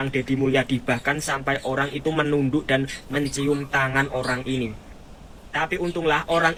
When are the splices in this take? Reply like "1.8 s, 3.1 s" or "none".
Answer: none